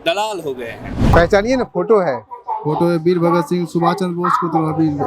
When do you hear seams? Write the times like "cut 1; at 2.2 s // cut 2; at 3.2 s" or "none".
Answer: cut 1; at 1.1 s

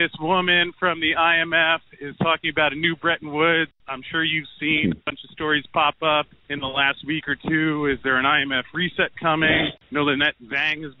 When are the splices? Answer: cut 1; at 3.8 s // cut 2; at 6.4 s // cut 3; at 9.7 s

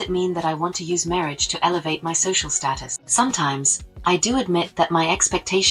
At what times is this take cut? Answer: cut 1; at 2.9 s

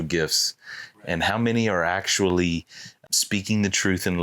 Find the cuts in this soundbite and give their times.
cut 1; at 3.0 s

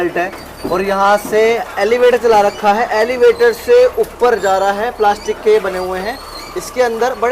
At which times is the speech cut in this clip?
cut 1; at 1.5 s

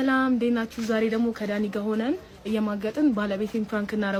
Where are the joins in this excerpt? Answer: none

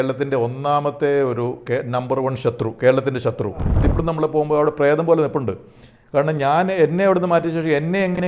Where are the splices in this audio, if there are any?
cut 1; at 3.8 s

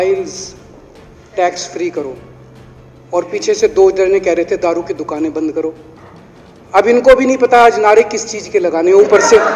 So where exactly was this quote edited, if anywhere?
none

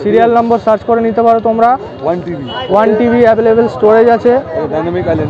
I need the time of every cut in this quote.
none

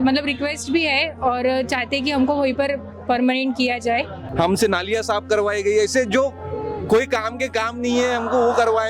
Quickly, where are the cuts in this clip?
cut 1; at 4.2 s

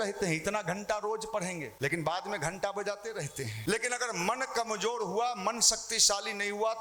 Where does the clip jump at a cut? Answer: cut 1; at 1.7 s // cut 2; at 3.5 s

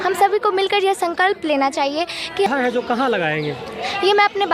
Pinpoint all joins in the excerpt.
cut 1; at 2.5 s

